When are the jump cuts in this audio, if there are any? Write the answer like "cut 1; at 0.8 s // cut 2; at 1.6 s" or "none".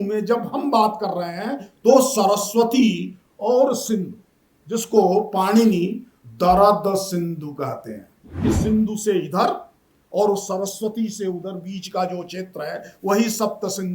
cut 1; at 8.4 s

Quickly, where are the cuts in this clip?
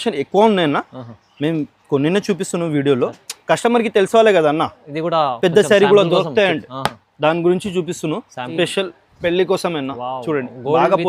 cut 1; at 8.5 s

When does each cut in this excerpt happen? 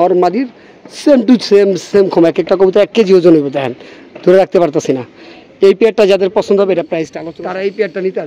cut 1; at 7.2 s

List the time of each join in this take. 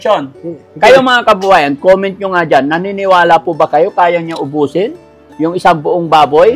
none

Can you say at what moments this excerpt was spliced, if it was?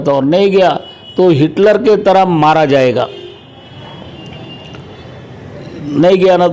none

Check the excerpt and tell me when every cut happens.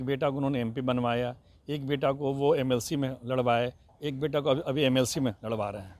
none

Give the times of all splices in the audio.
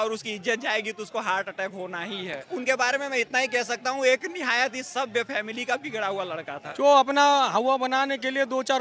cut 1; at 2.4 s // cut 2; at 6.7 s

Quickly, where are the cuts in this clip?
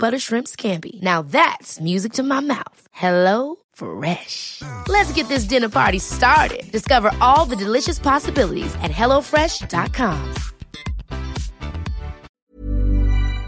cut 1; at 12.4 s

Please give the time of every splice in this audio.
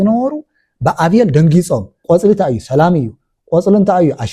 cut 1; at 1.9 s

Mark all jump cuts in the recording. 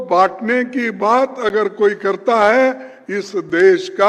none

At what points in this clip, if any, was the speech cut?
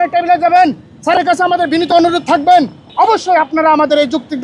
cut 1; at 2.8 s

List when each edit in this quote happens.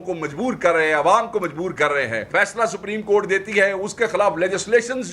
cut 1; at 2.2 s

